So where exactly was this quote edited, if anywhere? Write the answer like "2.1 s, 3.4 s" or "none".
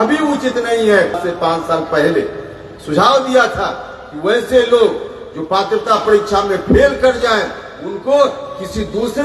1.2 s